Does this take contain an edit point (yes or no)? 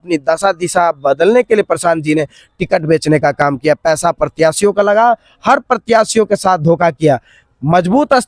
no